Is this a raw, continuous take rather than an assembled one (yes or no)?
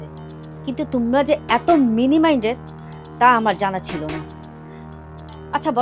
yes